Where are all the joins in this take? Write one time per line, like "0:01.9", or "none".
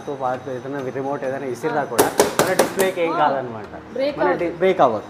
none